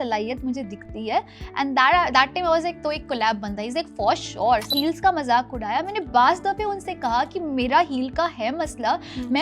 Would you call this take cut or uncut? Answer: cut